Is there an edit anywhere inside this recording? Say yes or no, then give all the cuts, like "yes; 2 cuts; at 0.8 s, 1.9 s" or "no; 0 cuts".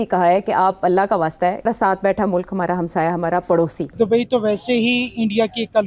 yes; 2 cuts; at 1.7 s, 3.8 s